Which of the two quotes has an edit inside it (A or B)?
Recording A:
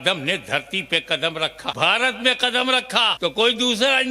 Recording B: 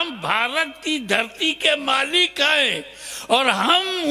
A